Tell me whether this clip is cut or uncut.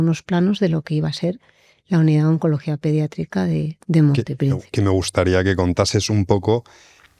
uncut